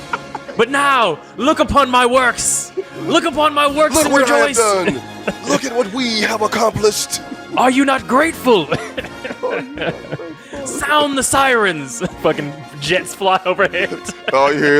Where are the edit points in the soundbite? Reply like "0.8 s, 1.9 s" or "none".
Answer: none